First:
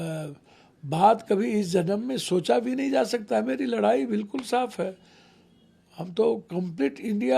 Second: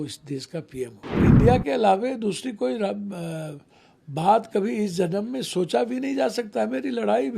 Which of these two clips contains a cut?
second; 1 cut; at 1.3 s

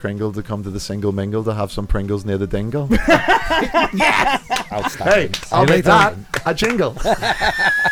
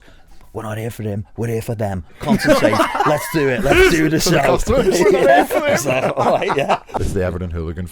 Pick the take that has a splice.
second; 1 cut; at 7.0 s

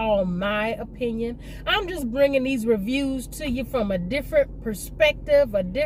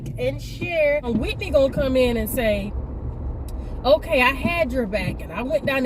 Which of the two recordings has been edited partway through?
second; 1 cut; at 1.1 s

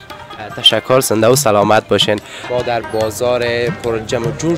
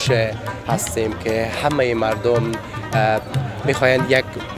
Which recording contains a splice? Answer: first; 1 cut; at 2.4 s

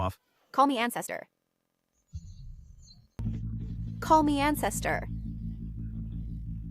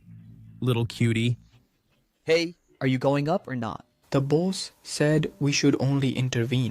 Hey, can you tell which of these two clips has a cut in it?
first; 1 cut; at 3.2 s

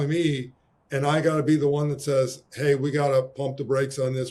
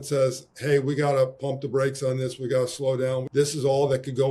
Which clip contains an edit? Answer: second; 1 cut; at 3.3 s

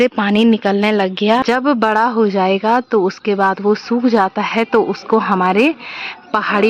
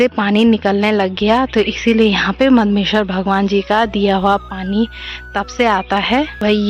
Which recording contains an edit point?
first; 1 cut; at 1.4 s

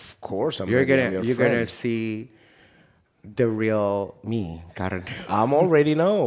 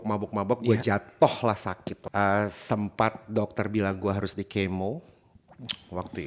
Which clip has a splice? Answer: second; 1 cut; at 1.9 s

